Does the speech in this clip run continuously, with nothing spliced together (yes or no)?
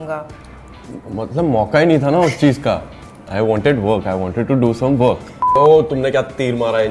no